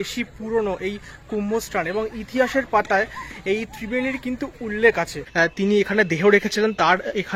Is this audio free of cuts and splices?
no; 1 cut; at 5.2 s

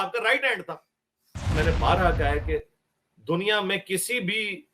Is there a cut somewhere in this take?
yes; 1 cut; at 1.5 s

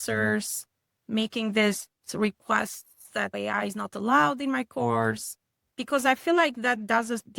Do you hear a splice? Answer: yes; 2 cuts; at 3.3 s, 5.6 s

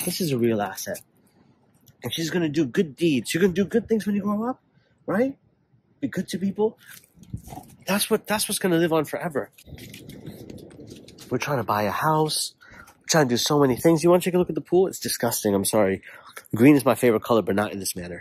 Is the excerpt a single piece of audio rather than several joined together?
yes; 0 cuts

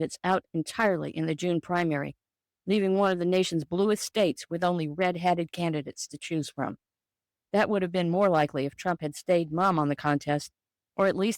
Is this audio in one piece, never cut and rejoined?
no; 2 cuts; at 5.5 s, 9.5 s

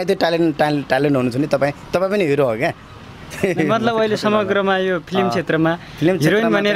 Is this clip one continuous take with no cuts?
yes; 0 cuts

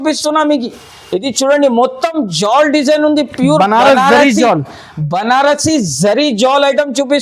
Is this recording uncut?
yes; 0 cuts

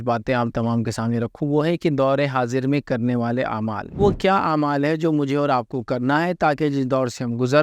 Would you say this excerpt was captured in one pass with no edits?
no; 1 cut; at 4.0 s

